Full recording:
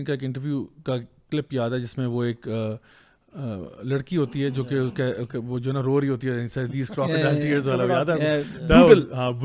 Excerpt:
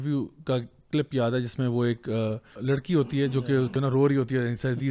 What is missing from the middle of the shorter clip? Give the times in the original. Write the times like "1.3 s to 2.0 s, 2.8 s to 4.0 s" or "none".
2.9 s to 3.7 s, 4.9 s to 5.6 s